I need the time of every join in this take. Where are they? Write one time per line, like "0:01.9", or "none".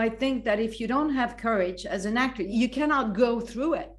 0:02.5